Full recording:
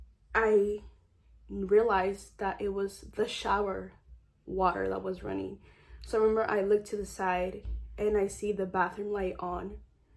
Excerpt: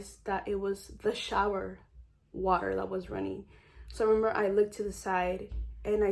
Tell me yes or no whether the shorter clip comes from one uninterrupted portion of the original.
yes